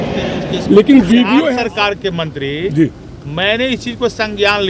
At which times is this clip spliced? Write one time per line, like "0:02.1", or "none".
0:01.6